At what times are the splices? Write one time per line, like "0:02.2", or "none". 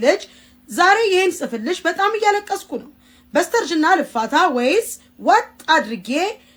none